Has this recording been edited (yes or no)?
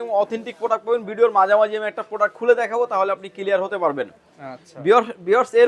no